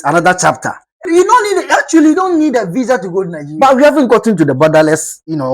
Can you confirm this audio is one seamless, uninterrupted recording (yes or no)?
no